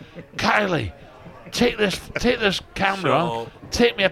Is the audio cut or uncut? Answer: uncut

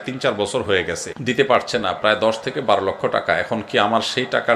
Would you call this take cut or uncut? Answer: cut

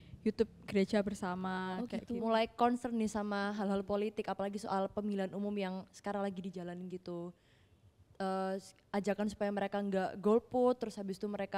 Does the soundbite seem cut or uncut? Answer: cut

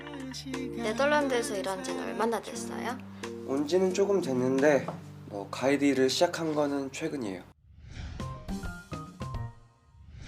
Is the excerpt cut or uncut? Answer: cut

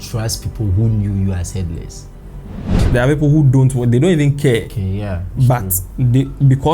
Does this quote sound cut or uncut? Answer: cut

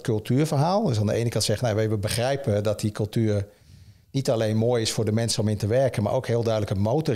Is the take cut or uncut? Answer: uncut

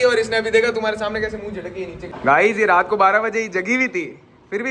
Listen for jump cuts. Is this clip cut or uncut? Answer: cut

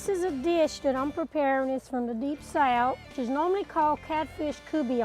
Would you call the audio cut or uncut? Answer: cut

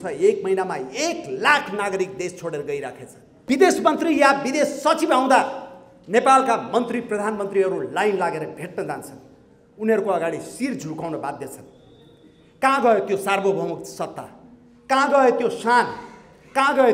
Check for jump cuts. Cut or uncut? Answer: cut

